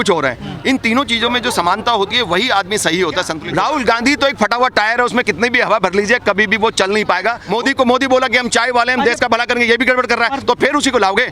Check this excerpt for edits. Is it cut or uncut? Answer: cut